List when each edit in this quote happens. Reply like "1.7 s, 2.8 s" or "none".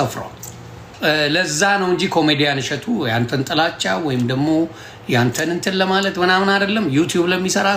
0.9 s